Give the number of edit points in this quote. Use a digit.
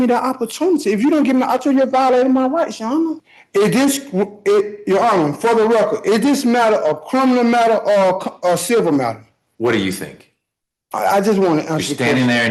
1